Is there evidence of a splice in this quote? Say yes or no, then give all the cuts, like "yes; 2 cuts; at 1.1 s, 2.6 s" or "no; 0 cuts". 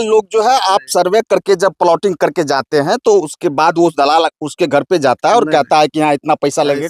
no; 0 cuts